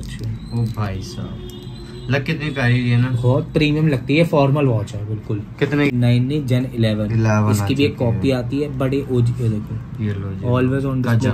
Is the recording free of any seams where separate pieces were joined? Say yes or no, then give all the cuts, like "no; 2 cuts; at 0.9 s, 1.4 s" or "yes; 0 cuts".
no; 1 cut; at 5.9 s